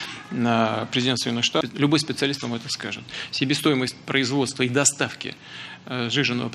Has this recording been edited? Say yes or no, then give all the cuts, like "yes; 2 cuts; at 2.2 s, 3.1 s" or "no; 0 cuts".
no; 0 cuts